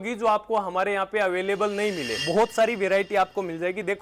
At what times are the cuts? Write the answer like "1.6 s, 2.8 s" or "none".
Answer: 2.2 s